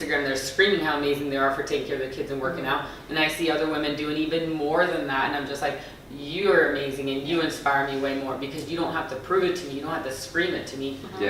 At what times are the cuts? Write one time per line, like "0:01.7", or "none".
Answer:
none

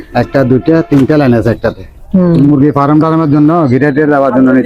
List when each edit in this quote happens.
0:02.4

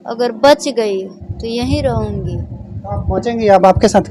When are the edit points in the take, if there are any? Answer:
none

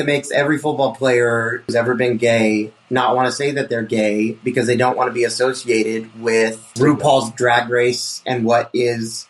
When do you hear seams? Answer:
0:01.7
0:06.7

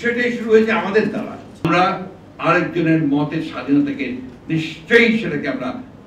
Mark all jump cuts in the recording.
0:01.6

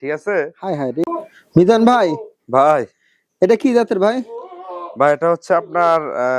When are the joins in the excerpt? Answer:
0:01.0

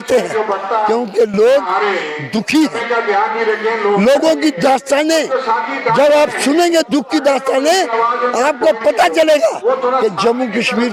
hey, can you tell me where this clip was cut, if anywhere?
none

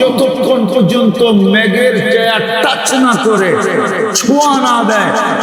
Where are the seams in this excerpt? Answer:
none

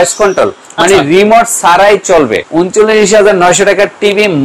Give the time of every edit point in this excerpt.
0:02.4

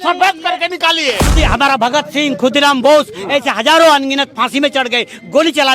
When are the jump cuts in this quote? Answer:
0:01.3

